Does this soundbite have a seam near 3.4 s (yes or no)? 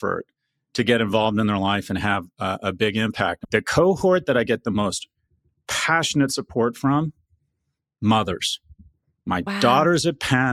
yes